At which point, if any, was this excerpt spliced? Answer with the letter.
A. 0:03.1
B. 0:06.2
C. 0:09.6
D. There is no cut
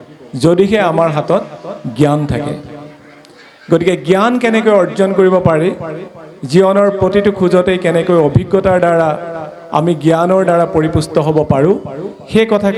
D